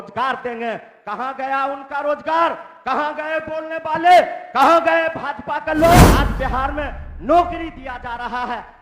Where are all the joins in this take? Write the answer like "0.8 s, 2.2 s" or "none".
6.1 s